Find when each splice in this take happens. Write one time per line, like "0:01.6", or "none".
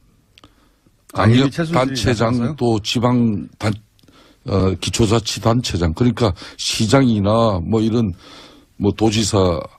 0:04.6